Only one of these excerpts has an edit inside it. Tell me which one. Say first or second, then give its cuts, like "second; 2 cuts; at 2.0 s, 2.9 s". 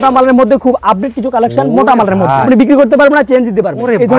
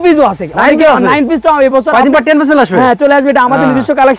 first; 1 cut; at 2.5 s